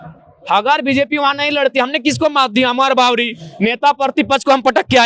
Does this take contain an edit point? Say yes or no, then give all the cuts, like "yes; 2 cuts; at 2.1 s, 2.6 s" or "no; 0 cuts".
no; 0 cuts